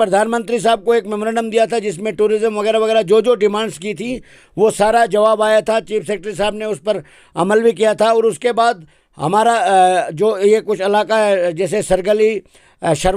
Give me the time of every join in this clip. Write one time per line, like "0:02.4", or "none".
none

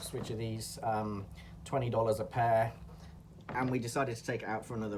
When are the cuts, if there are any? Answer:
0:03.2

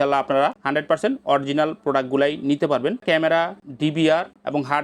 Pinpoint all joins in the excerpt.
0:03.0

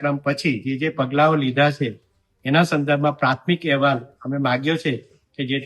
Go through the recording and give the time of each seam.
none

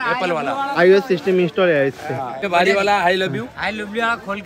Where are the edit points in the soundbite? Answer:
0:02.5

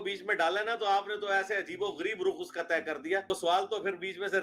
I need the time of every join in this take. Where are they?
0:03.3

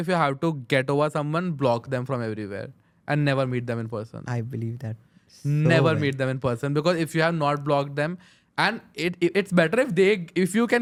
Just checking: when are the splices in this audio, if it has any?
none

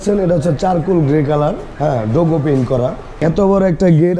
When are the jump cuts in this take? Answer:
0:01.7
0:03.2

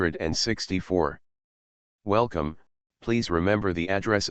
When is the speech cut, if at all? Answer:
0:00.9

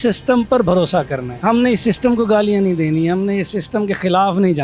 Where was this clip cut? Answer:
0:01.2

